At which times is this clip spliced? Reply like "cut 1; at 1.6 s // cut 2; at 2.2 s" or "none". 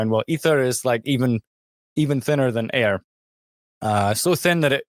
none